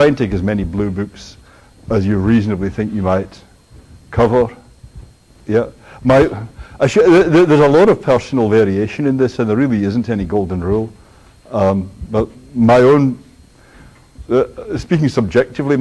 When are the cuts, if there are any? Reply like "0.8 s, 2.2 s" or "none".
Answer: 12.6 s